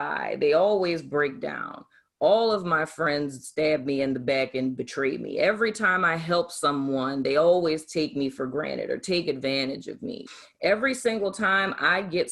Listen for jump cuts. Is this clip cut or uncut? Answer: cut